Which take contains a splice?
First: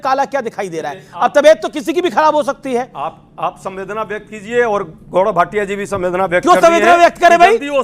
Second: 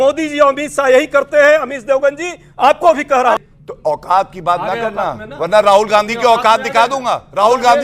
second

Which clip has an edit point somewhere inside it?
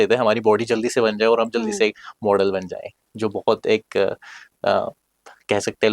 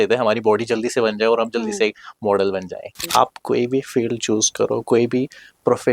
second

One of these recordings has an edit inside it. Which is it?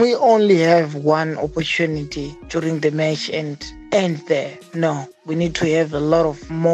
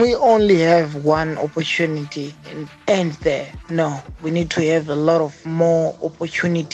second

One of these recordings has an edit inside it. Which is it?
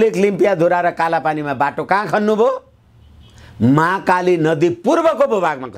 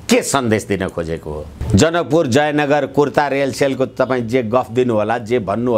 second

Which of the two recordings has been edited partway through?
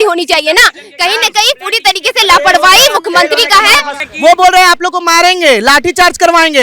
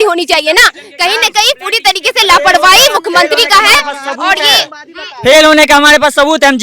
first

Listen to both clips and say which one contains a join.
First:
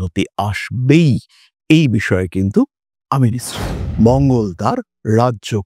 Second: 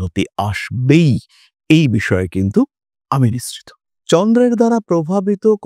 first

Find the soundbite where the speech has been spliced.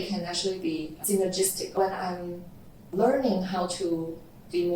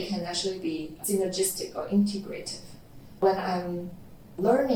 first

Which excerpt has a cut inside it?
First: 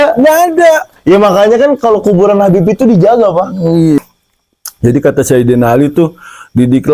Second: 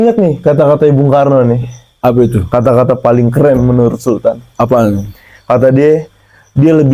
first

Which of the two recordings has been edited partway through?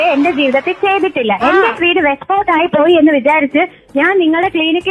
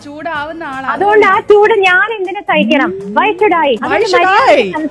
second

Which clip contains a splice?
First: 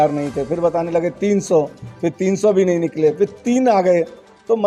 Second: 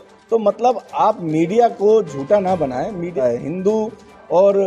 second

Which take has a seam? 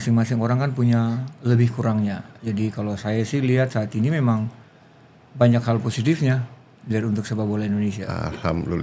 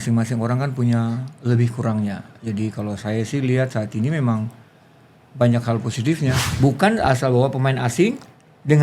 second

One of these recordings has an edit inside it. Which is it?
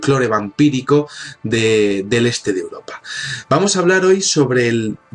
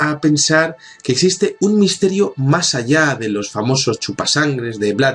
first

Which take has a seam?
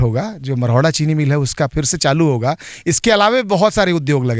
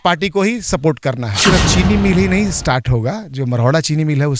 second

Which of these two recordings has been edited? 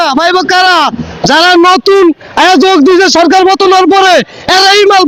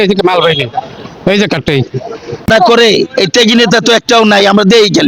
second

